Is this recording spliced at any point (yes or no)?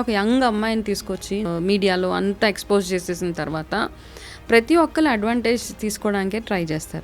yes